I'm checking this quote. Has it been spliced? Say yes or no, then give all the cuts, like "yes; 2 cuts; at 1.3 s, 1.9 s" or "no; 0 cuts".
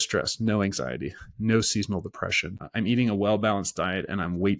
yes; 1 cut; at 2.6 s